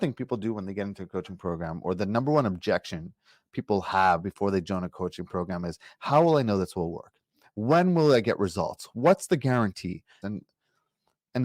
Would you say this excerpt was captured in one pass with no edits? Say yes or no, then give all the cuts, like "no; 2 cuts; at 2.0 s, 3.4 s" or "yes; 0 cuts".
no; 1 cut; at 10.2 s